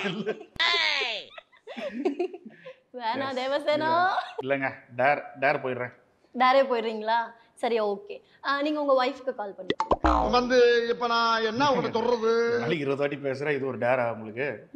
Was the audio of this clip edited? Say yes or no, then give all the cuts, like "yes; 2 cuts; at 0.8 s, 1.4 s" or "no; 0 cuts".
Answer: no; 0 cuts